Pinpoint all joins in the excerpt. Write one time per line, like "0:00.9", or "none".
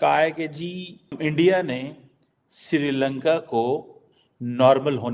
0:01.2